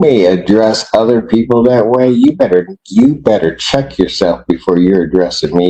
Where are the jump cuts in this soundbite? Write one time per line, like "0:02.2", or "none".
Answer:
none